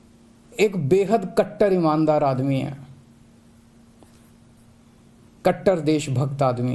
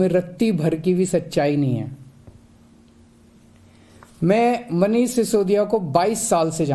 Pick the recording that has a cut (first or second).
first